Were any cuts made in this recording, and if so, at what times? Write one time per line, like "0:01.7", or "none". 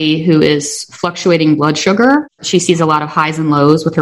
0:02.4